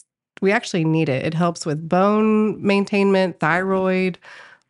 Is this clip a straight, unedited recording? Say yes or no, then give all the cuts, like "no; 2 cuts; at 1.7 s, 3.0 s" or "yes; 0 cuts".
yes; 0 cuts